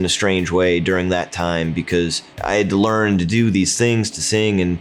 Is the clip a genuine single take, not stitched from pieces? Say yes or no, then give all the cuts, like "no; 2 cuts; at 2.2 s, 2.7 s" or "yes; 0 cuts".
no; 1 cut; at 2.3 s